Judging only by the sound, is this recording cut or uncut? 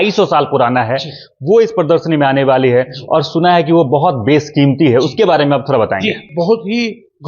cut